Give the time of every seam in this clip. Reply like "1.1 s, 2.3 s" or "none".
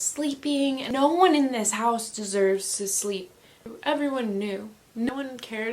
0.9 s, 3.7 s, 5.1 s